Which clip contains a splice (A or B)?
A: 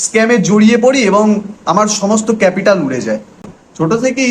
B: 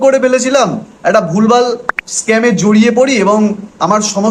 A